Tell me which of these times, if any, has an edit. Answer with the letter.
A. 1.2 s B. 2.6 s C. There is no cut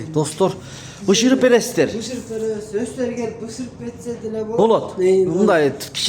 C